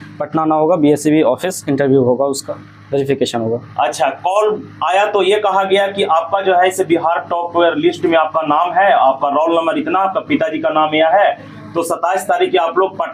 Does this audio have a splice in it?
no; 0 cuts

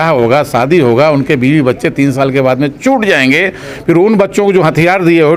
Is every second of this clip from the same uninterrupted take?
yes; 0 cuts

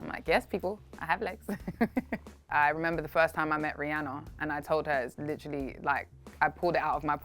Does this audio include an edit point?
yes; 1 cut; at 2.4 s

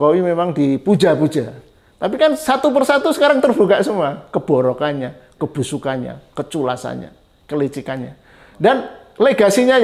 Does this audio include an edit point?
no; 0 cuts

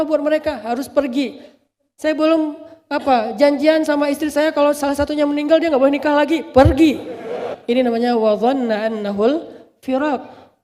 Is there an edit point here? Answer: yes; 1 cut; at 7.5 s

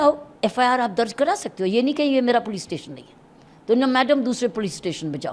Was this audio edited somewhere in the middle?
no; 0 cuts

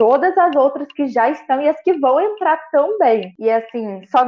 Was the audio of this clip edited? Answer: yes; 1 cut; at 3.3 s

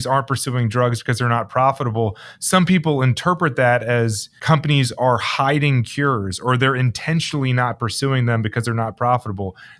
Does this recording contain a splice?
yes; 1 cut; at 4.3 s

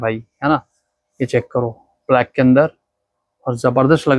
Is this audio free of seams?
yes; 0 cuts

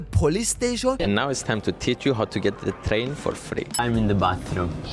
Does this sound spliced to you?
yes; 1 cut; at 3.8 s

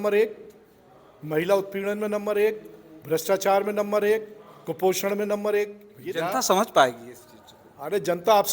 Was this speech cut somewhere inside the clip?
yes; 1 cut; at 5.9 s

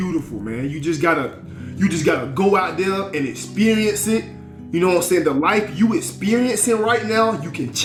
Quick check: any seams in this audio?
no; 0 cuts

